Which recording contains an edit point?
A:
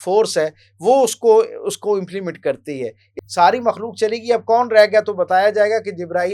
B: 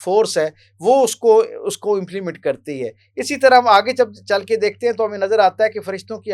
A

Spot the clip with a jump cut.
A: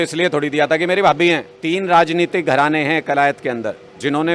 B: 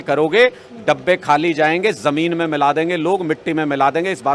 A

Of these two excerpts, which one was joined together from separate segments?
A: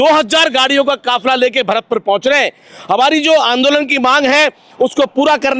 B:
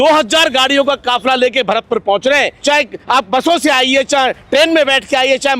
B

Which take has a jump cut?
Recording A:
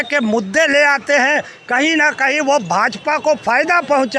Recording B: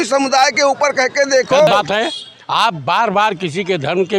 B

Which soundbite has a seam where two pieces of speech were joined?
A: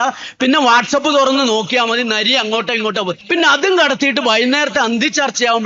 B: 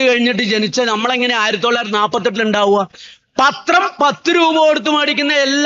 A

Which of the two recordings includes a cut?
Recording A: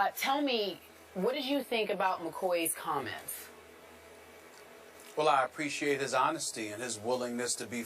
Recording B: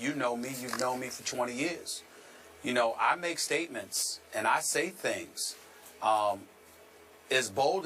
A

